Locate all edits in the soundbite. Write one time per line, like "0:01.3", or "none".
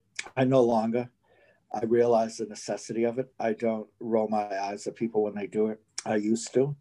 0:03.3
0:05.9